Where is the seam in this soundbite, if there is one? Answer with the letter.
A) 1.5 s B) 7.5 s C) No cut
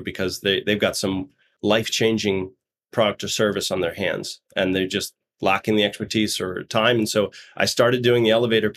A